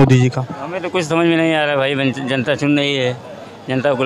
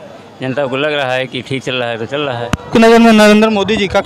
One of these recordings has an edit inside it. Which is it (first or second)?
second